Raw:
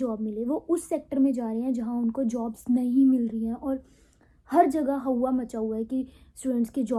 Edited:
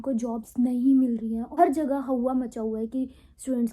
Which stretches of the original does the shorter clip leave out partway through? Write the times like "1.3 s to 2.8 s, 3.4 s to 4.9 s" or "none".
3.6 s to 4.4 s